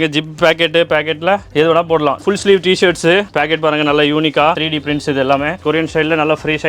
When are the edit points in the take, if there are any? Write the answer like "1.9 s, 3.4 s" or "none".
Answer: 2.2 s, 5.6 s